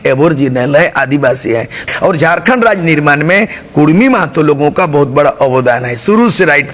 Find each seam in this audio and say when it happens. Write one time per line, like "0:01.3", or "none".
0:01.8